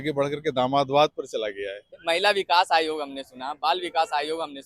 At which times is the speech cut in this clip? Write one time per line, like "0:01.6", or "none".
0:01.9